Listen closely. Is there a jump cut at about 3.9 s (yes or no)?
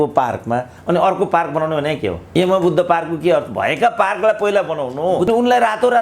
no